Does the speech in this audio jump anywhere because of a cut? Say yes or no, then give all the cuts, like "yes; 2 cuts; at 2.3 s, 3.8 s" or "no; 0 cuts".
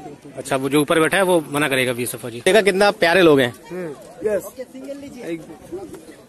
yes; 1 cut; at 2.5 s